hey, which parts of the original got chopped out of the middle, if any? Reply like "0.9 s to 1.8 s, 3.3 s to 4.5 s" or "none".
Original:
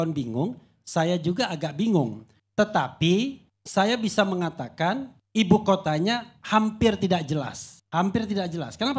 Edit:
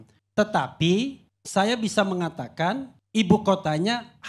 none